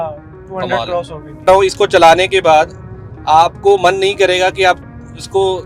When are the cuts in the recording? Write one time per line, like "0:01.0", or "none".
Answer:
0:01.5